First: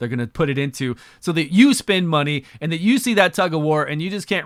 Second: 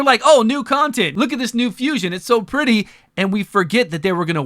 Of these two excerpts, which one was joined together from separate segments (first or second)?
second